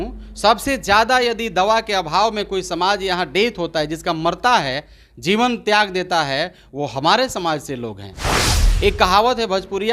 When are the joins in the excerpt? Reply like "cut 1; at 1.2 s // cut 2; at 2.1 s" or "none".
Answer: cut 1; at 8.4 s